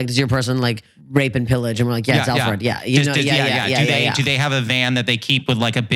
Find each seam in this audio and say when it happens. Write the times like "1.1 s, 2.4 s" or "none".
0.9 s